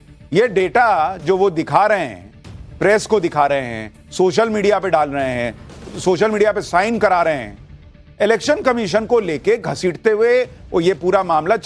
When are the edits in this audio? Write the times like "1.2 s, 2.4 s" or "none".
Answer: none